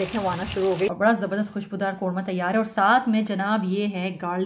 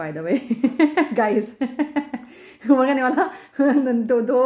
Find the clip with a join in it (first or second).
first